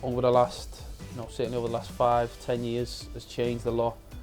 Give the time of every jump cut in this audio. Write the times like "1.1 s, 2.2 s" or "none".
none